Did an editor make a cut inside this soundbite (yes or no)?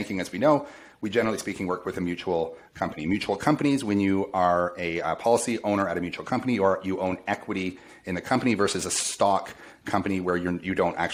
no